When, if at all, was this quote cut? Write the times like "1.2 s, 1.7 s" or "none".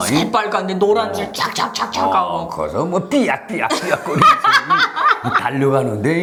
none